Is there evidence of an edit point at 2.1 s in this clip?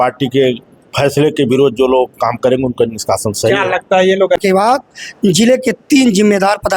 no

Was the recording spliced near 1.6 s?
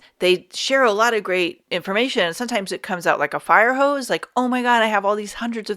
yes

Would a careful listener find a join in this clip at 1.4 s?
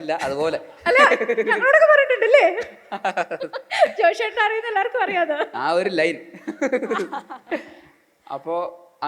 no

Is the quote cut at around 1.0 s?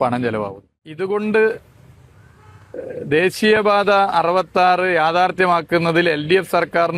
yes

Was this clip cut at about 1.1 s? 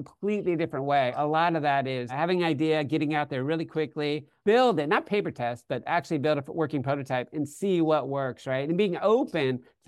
yes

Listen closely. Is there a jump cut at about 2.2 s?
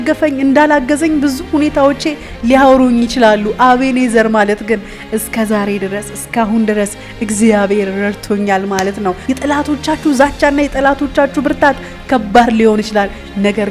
no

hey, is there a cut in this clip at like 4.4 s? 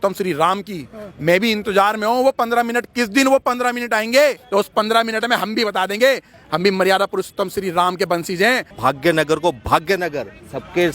yes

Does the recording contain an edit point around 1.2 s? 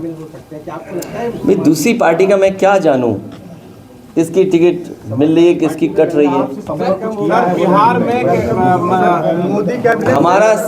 no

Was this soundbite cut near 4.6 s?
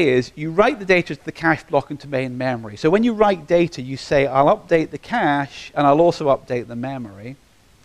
yes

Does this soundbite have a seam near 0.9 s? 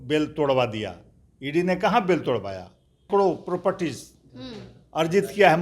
no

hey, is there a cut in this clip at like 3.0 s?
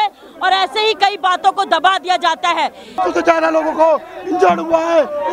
yes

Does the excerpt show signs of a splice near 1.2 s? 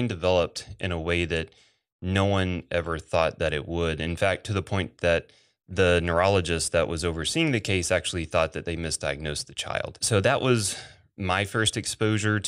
no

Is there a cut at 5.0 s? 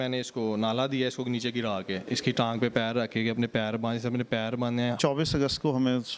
yes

